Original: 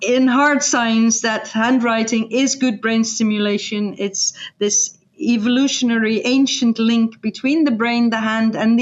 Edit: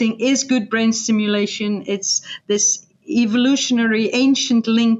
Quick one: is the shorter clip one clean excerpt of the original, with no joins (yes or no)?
yes